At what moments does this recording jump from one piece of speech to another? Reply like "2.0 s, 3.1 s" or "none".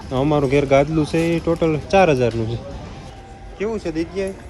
none